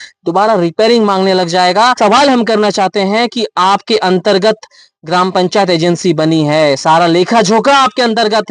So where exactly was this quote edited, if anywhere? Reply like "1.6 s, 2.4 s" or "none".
2.0 s